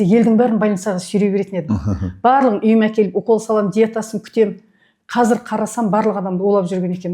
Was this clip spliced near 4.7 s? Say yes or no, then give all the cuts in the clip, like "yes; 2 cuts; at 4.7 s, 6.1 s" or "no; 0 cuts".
no; 0 cuts